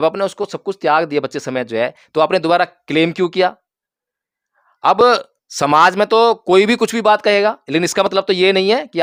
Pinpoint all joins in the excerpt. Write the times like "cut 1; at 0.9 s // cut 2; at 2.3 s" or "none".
none